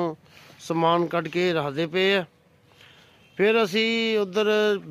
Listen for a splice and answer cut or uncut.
uncut